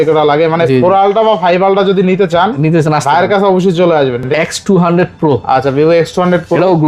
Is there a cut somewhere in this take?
yes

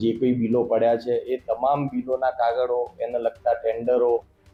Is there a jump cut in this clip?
no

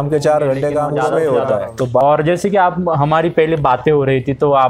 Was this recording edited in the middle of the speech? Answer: yes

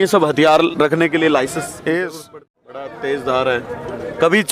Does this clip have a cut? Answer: yes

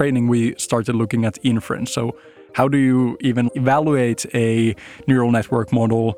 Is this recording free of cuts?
no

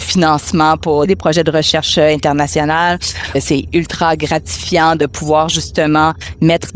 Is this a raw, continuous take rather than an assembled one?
no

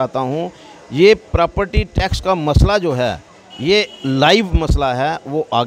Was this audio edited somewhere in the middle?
no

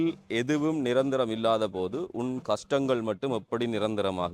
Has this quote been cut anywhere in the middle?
no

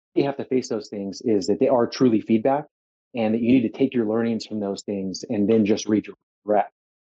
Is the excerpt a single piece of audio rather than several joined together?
yes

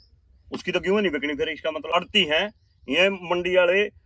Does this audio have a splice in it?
yes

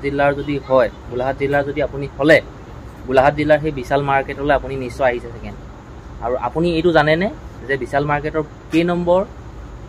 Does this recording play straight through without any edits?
yes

